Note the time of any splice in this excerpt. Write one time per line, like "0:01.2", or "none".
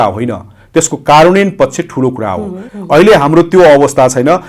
0:02.6